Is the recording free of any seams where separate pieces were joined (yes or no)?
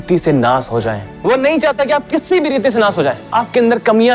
no